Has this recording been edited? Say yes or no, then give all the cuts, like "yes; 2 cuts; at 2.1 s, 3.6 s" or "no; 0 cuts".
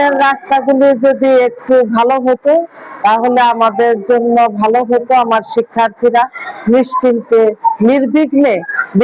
no; 0 cuts